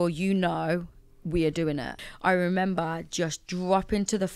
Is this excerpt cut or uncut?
cut